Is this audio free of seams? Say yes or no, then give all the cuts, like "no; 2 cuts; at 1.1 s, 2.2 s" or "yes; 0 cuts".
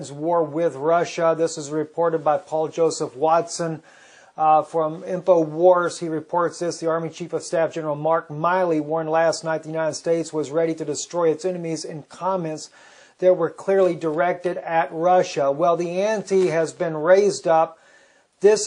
yes; 0 cuts